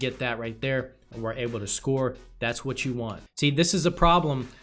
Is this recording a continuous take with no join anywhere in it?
no; 1 cut; at 3.2 s

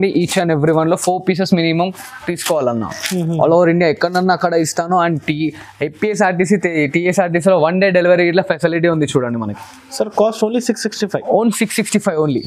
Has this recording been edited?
no; 0 cuts

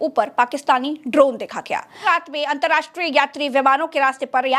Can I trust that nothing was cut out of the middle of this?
no; 1 cut; at 2.0 s

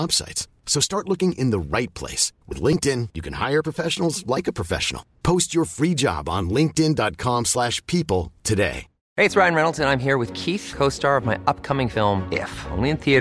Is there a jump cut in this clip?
no; 0 cuts

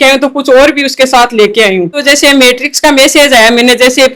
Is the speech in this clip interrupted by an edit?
yes; 1 cut; at 2.0 s

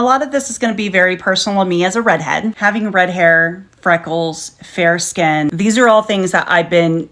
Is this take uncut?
yes; 0 cuts

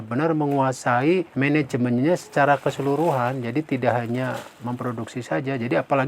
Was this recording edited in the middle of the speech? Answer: yes; 1 cut; at 1.3 s

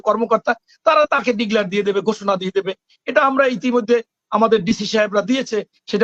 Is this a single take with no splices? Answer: yes; 0 cuts

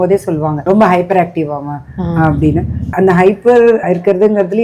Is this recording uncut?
yes; 0 cuts

